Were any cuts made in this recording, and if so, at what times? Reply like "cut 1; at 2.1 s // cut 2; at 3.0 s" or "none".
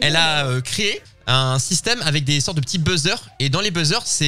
cut 1; at 1.1 s